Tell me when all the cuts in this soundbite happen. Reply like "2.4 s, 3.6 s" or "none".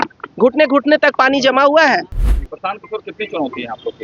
2.2 s